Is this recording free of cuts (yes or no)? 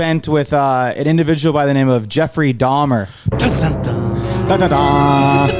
yes